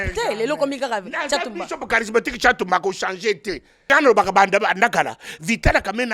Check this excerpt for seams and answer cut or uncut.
cut